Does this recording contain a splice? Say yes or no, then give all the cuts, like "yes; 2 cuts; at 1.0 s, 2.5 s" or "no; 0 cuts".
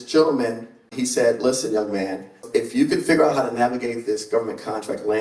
yes; 2 cuts; at 0.9 s, 2.4 s